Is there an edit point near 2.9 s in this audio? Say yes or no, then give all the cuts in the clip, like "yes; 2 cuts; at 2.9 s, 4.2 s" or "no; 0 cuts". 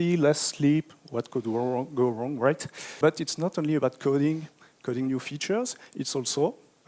yes; 1 cut; at 2.9 s